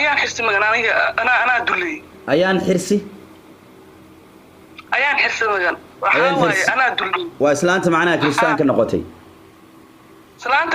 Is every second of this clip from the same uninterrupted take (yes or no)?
yes